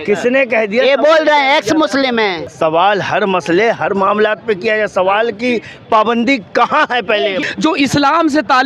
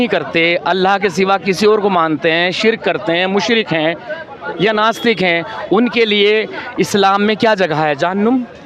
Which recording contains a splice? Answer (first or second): first